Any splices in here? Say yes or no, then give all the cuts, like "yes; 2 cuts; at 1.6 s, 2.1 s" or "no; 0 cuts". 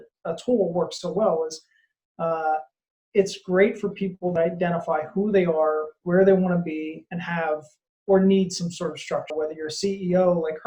yes; 1 cut; at 9.3 s